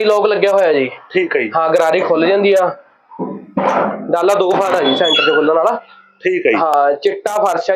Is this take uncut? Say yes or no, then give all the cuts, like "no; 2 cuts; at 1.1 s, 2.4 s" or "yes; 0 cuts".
yes; 0 cuts